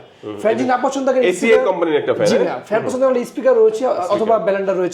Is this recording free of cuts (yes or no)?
yes